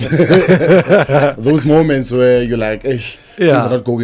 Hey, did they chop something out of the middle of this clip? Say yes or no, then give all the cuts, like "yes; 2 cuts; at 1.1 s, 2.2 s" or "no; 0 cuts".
no; 0 cuts